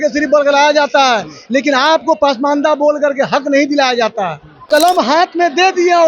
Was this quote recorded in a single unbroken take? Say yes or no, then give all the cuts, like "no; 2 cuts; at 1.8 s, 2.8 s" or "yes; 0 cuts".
no; 1 cut; at 4.7 s